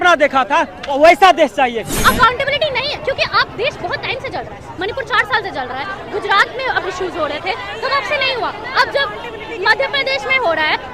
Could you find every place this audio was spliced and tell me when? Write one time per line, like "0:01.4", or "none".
0:01.9